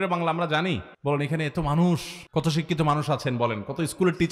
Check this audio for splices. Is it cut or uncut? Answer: cut